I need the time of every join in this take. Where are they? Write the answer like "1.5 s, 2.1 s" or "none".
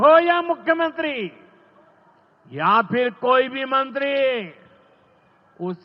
none